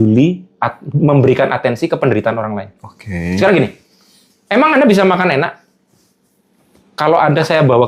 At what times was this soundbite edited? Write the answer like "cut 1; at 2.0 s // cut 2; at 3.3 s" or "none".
none